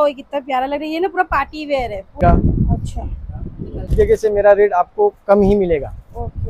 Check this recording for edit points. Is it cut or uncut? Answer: cut